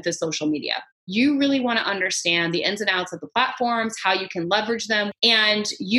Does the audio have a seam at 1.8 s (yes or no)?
no